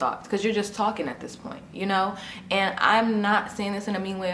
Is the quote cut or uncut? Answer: uncut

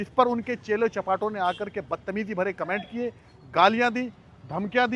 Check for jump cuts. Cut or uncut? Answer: uncut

